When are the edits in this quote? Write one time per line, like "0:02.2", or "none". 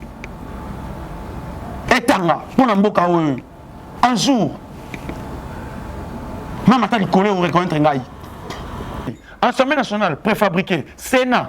0:09.2